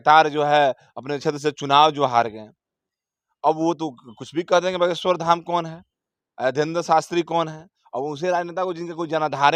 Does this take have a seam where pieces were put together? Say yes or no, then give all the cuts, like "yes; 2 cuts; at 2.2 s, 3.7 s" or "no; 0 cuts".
no; 0 cuts